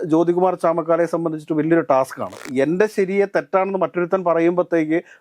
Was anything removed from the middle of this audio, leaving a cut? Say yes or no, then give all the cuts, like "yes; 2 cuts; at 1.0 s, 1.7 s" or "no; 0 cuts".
yes; 1 cut; at 2.4 s